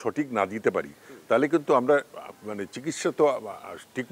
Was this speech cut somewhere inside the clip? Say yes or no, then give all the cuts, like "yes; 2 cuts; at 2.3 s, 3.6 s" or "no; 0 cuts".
no; 0 cuts